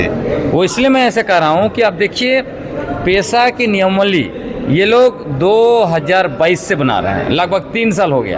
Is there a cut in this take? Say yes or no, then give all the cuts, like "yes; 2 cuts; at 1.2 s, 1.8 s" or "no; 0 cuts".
no; 0 cuts